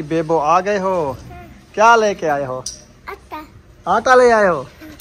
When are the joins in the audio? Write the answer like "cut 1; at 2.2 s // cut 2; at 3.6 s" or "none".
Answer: none